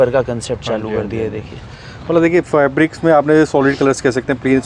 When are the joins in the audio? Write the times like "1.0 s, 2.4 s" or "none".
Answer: none